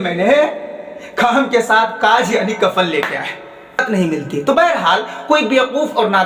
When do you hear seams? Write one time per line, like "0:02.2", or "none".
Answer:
0:03.8